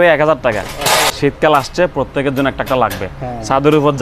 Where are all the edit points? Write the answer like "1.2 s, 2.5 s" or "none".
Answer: 1.1 s